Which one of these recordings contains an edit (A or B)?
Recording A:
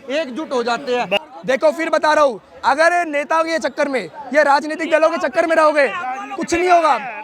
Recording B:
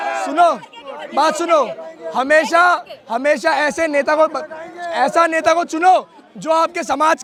A